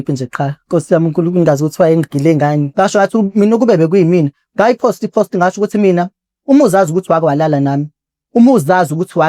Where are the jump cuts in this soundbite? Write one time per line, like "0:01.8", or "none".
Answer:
0:02.7